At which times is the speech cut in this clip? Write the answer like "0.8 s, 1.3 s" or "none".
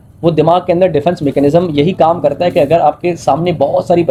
none